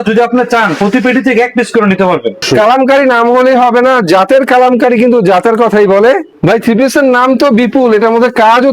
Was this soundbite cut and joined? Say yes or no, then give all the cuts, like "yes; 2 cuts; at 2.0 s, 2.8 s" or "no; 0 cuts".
yes; 2 cuts; at 2.4 s, 6.3 s